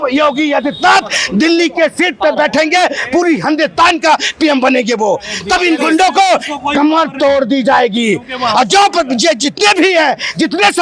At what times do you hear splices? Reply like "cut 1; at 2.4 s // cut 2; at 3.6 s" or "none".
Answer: none